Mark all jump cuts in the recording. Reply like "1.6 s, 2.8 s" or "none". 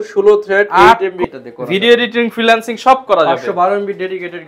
1.2 s